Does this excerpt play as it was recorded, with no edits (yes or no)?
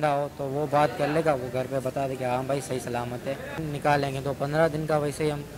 no